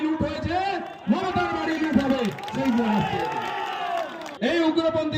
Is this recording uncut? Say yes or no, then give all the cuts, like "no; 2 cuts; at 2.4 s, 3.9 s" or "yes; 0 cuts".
no; 1 cut; at 4.2 s